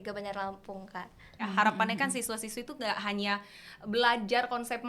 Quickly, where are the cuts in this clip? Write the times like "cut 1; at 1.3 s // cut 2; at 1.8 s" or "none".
cut 1; at 1.4 s